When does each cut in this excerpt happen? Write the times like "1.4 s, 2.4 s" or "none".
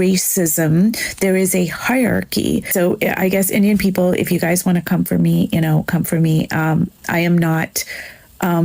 2.7 s